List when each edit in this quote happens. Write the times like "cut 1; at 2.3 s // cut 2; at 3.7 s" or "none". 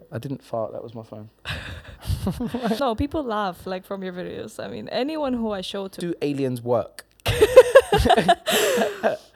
cut 1; at 2.8 s // cut 2; at 5.9 s